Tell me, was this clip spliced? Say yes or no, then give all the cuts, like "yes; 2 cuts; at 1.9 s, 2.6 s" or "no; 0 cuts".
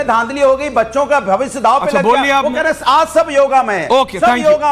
no; 0 cuts